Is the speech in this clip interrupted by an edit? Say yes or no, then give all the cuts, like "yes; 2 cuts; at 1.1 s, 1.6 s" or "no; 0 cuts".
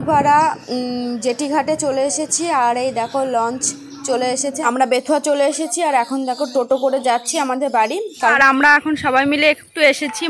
yes; 2 cuts; at 4.6 s, 8.3 s